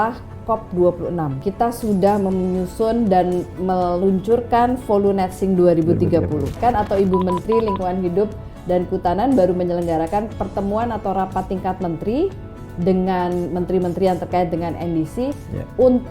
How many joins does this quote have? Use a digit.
2